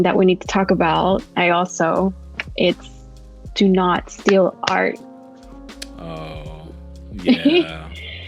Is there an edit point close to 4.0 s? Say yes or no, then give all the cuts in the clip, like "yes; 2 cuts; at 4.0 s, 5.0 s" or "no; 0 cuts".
no; 0 cuts